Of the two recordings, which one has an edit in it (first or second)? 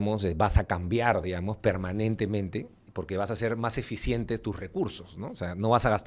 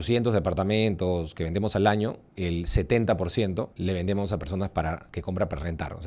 second